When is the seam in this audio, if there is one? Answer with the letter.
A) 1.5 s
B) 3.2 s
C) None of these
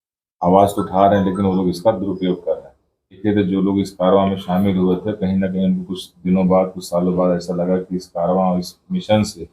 B